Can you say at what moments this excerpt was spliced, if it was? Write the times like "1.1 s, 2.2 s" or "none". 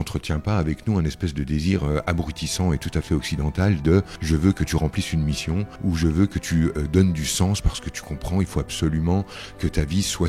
4.1 s, 5.7 s